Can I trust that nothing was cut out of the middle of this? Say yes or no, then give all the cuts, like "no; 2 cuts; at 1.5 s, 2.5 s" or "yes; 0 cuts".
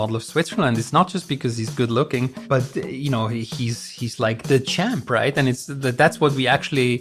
no; 1 cut; at 2.4 s